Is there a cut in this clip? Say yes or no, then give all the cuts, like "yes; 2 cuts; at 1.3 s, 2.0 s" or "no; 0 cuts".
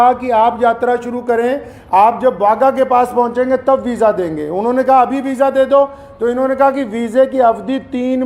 no; 0 cuts